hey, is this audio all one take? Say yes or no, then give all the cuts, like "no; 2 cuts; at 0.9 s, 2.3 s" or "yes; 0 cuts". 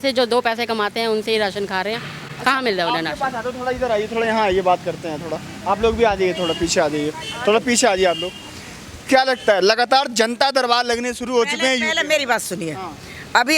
yes; 0 cuts